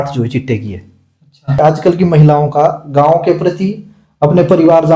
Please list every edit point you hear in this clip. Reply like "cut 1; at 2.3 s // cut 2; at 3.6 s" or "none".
cut 1; at 1.6 s